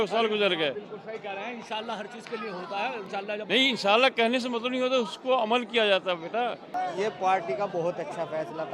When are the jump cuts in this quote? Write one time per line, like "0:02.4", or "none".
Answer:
0:06.6